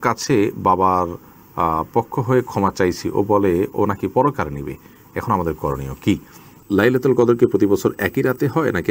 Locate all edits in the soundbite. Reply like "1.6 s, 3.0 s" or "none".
6.6 s